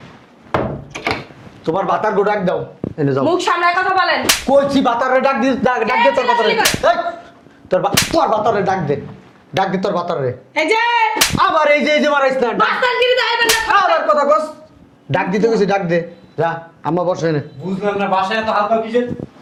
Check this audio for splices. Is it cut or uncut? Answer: uncut